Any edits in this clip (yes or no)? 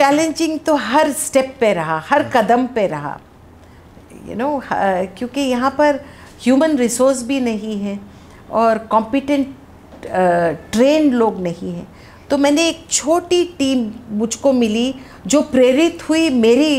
no